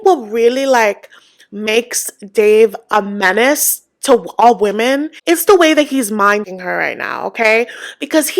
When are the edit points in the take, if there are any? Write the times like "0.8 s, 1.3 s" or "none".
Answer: 6.5 s